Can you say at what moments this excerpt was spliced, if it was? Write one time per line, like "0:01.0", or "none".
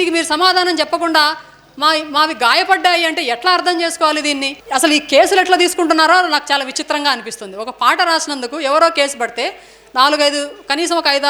0:04.5